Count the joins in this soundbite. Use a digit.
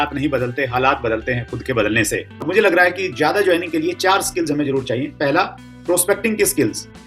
1